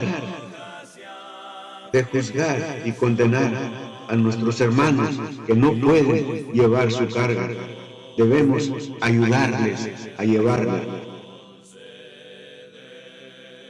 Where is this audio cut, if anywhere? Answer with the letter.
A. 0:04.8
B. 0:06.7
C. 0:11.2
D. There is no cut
C